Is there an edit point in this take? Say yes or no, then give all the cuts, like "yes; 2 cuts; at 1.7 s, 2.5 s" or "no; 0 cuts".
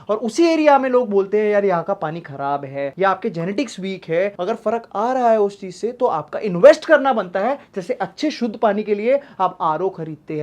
no; 0 cuts